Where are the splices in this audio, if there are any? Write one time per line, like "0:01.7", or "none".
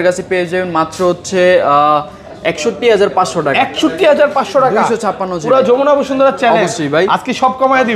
none